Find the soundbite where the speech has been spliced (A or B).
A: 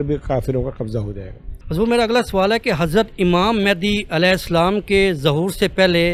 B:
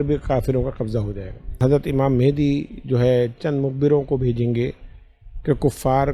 B